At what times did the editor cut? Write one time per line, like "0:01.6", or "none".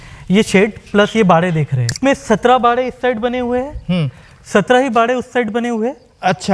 0:02.0